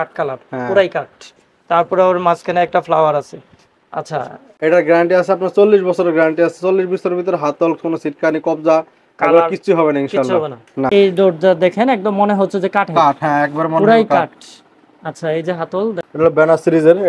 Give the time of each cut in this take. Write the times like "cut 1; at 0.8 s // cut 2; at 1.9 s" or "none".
cut 1; at 4.5 s // cut 2; at 10.9 s // cut 3; at 16.0 s